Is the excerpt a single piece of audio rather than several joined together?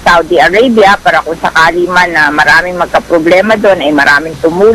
yes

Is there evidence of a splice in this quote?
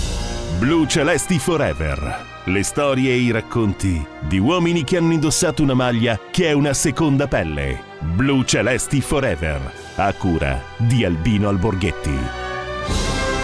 no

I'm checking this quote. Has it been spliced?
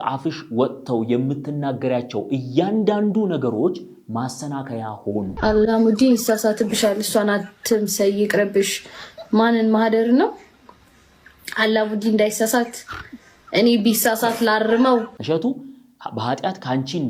yes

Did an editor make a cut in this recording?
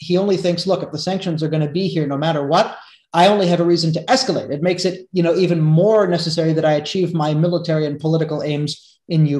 no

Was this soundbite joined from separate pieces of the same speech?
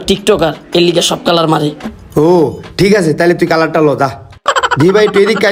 no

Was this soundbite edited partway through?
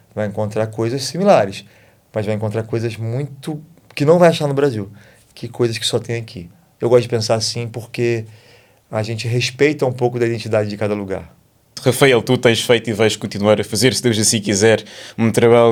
no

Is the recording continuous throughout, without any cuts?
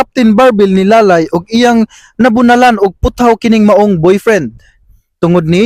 yes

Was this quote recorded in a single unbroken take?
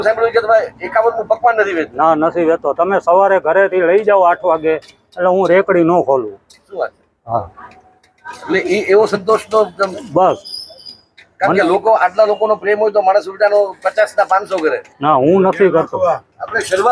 yes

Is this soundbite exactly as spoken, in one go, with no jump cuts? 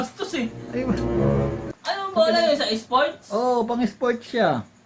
no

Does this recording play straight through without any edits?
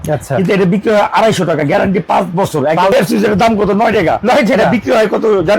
no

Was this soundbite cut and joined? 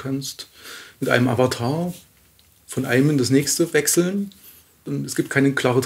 yes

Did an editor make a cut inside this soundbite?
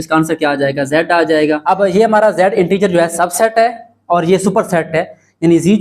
yes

